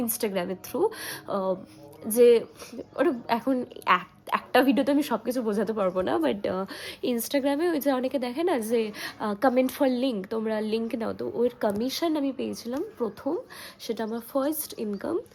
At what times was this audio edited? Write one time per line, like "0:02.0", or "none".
none